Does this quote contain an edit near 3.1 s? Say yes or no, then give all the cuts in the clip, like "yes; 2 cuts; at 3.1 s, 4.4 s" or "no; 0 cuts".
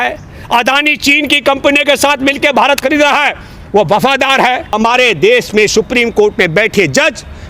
no; 1 cut; at 4.7 s